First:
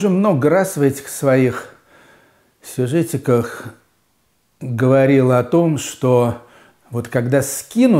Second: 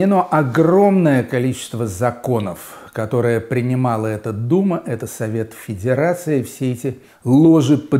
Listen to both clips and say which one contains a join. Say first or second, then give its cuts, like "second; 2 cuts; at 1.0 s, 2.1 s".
second; 1 cut; at 7.1 s